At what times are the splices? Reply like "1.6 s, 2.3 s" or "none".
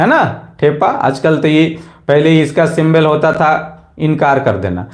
none